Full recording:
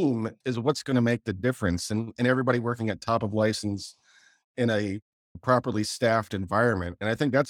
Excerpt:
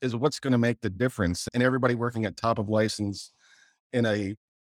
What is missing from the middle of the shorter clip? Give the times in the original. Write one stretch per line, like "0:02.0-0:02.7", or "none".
0:01.9-0:02.1